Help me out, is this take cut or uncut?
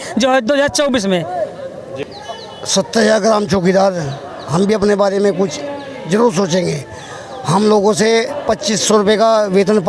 cut